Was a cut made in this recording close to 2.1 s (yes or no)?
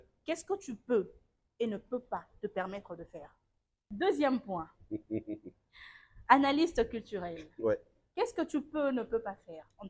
no